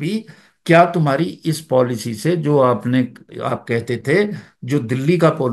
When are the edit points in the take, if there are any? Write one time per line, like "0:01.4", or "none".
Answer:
none